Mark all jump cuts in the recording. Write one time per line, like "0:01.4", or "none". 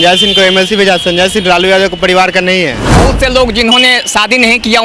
0:03.1